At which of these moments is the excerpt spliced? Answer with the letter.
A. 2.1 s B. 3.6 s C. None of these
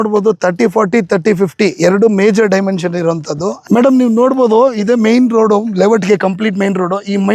B